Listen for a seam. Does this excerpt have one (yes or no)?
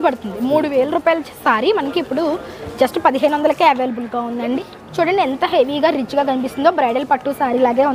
yes